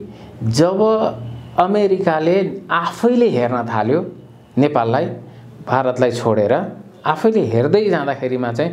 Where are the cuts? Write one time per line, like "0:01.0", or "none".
none